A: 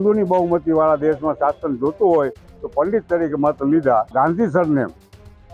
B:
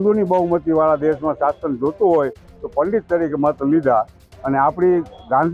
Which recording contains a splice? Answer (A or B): A